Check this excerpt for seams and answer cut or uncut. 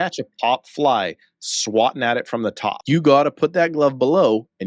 cut